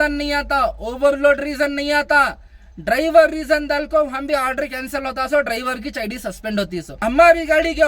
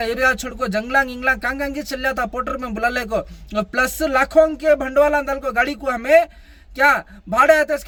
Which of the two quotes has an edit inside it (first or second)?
first